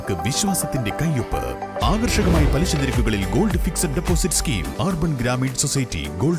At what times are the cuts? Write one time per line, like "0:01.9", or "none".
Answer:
0:04.7